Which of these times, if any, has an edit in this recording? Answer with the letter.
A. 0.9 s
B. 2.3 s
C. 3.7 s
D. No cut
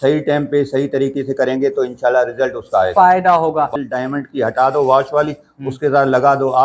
C